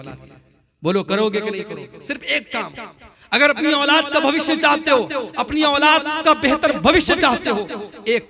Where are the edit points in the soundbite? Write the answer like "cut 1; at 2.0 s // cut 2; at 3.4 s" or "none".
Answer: none